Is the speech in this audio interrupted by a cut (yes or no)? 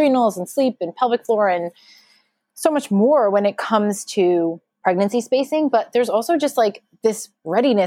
yes